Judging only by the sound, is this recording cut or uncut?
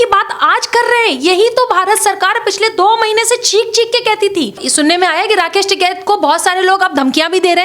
cut